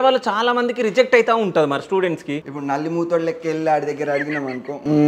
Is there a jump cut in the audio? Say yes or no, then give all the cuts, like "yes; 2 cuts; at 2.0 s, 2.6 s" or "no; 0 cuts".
yes; 1 cut; at 2.3 s